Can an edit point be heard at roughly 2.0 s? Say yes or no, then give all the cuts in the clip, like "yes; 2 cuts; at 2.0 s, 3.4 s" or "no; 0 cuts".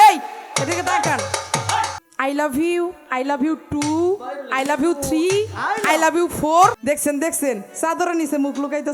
yes; 2 cuts; at 2.0 s, 6.8 s